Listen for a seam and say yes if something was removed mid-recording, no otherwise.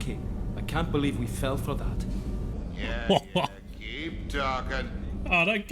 yes